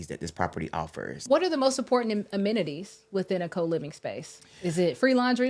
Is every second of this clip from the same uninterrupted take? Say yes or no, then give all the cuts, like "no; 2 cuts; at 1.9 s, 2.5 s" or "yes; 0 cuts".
no; 1 cut; at 1.2 s